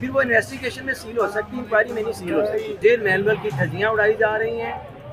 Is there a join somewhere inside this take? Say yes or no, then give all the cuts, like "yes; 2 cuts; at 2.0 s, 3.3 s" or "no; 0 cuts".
yes; 1 cut; at 2.8 s